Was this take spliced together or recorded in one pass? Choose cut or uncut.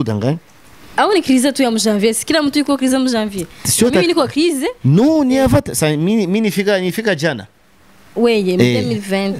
uncut